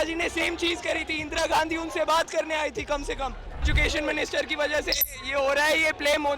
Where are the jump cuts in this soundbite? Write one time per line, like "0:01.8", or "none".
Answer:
0:03.7